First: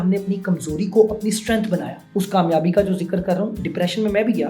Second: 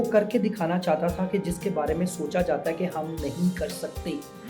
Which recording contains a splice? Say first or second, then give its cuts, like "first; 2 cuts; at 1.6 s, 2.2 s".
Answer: first; 1 cut; at 2.0 s